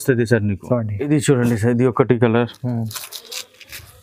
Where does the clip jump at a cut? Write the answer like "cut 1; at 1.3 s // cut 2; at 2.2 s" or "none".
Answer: cut 1; at 0.9 s